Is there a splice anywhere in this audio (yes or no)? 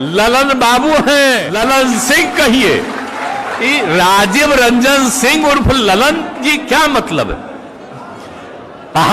yes